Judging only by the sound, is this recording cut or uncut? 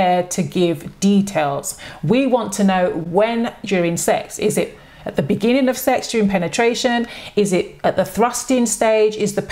cut